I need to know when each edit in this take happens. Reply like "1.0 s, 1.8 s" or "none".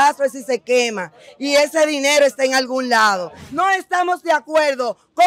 3.4 s

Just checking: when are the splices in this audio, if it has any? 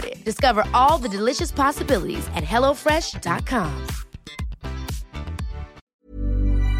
5.8 s

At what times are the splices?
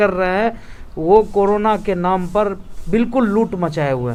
none

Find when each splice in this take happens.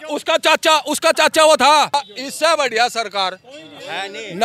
1.9 s

